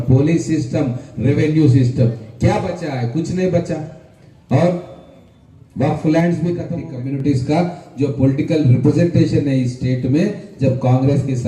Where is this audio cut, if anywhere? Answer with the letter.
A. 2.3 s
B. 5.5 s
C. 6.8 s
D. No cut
C